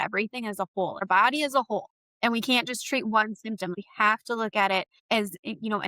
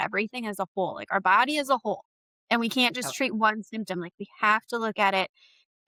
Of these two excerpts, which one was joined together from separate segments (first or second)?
first